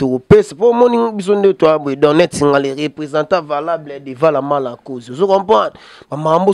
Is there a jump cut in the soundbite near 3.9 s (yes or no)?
no